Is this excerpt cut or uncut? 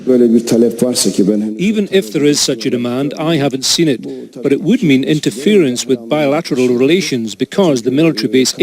cut